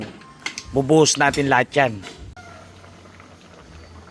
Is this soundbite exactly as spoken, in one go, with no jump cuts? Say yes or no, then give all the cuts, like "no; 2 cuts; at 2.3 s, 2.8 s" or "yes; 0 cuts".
no; 1 cut; at 2.3 s